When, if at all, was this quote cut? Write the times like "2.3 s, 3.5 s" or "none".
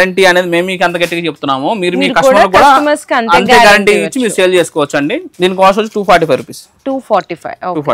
none